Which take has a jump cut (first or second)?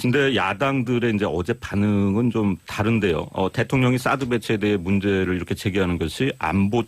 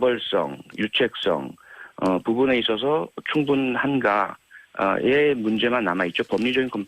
first